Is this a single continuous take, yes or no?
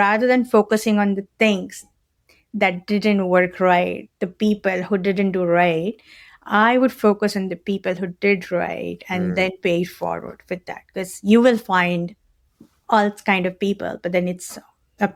yes